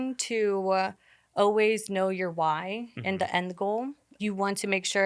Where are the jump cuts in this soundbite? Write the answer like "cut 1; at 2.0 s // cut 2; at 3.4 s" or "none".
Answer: cut 1; at 4.0 s